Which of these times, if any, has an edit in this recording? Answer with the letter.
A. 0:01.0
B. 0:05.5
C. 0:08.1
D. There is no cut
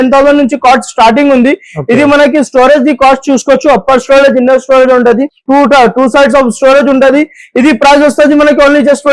D